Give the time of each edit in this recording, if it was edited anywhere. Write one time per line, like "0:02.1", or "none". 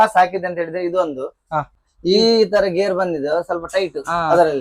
0:01.7